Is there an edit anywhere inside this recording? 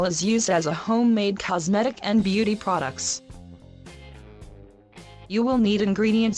no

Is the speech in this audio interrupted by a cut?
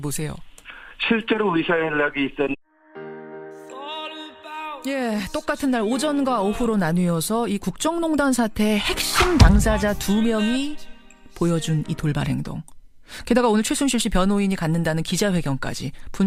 no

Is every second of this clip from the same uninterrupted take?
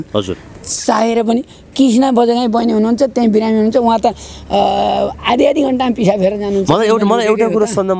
yes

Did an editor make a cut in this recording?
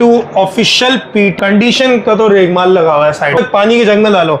yes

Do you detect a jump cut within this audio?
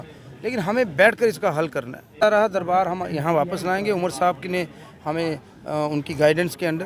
yes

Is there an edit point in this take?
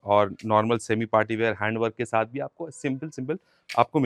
no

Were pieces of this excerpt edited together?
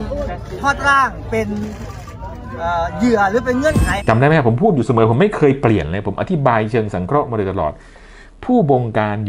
yes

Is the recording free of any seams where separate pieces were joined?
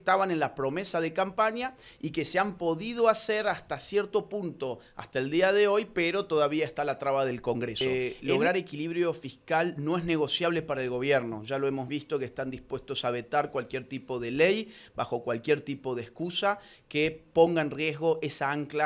no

